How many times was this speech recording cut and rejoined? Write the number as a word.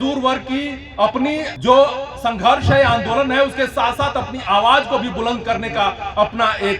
one